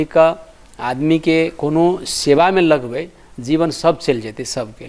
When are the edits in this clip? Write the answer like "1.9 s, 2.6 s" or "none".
none